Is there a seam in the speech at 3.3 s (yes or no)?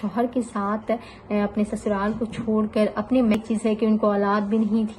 yes